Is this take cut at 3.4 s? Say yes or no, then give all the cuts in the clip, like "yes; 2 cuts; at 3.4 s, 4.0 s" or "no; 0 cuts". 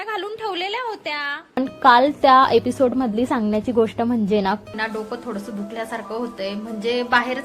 no; 2 cuts; at 1.6 s, 4.7 s